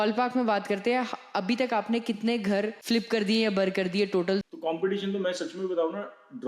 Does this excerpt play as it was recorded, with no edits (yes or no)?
no